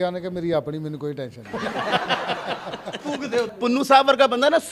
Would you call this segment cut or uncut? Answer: cut